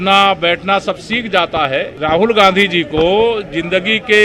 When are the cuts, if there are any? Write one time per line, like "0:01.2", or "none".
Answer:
0:01.9